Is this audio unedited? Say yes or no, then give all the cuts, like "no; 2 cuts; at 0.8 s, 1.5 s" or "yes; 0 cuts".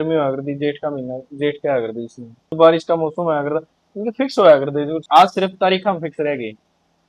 no; 2 cuts; at 2.5 s, 5.0 s